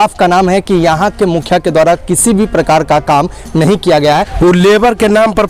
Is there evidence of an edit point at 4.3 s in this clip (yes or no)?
yes